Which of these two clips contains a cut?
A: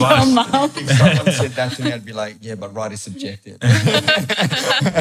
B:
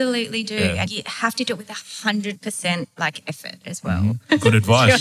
B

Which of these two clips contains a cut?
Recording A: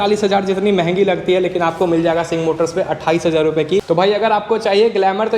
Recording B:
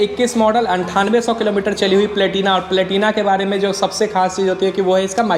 A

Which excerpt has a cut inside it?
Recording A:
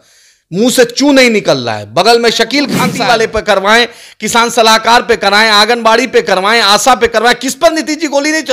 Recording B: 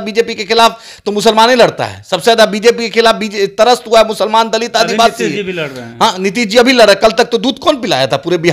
A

